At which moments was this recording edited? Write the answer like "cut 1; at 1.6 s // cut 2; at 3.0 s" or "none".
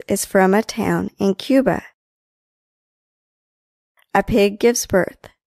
none